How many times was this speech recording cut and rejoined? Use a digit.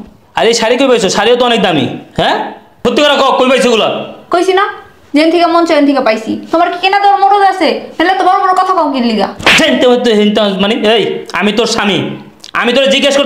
2